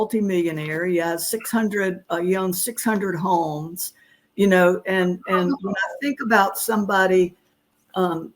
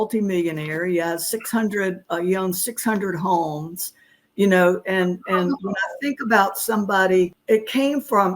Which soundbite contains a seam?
second; 1 cut; at 7.4 s

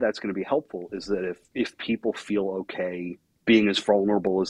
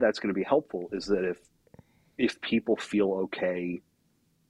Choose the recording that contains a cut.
first; 2 cuts; at 1.4 s, 3.3 s

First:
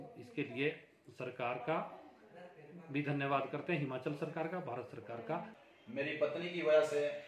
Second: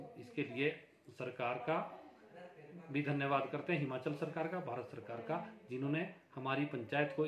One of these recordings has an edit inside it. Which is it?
first; 1 cut; at 5.6 s

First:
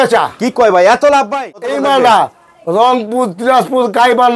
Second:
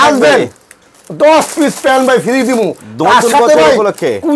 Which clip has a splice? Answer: first; 1 cut; at 1.4 s

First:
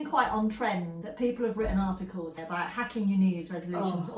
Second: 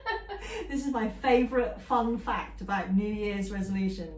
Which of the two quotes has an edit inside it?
first; 2 cuts; at 1.0 s, 2.3 s

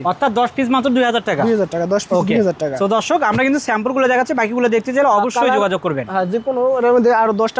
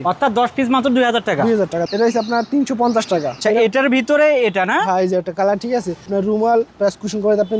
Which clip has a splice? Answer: second; 3 cuts; at 1.8 s, 3.4 s, 6.1 s

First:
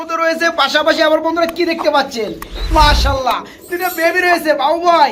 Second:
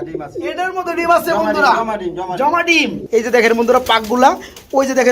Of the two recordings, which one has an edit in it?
second; 1 cut; at 3.0 s

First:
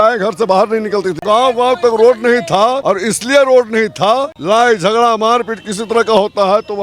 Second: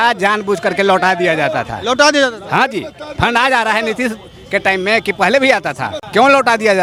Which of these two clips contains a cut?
first; 3 cuts; at 1.2 s, 2.8 s, 4.4 s

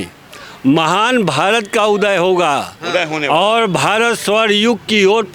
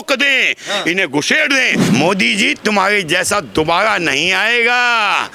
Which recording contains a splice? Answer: second; 1 cut; at 1.8 s

